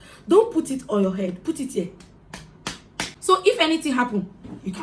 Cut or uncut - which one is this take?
cut